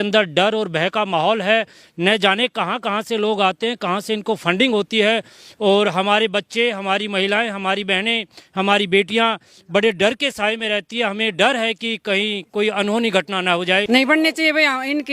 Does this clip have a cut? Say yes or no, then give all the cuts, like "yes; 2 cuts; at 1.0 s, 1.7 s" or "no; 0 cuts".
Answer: yes; 1 cut; at 13.8 s